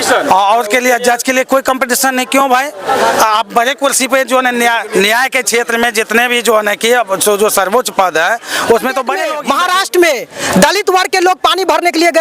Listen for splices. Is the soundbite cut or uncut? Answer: cut